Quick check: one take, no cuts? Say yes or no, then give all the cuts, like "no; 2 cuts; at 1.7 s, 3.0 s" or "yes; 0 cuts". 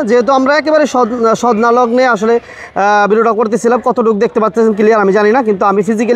yes; 0 cuts